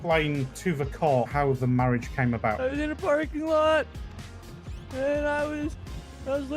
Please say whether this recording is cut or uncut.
cut